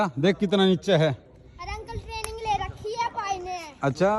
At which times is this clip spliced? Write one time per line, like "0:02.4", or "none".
none